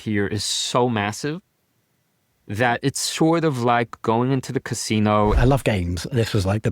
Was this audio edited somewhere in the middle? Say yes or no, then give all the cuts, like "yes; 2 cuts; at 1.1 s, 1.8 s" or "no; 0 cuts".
yes; 1 cut; at 5.4 s